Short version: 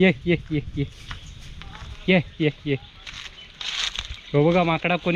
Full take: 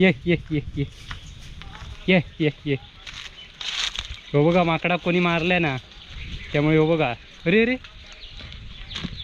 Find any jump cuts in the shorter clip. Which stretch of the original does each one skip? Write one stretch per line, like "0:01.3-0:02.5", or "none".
none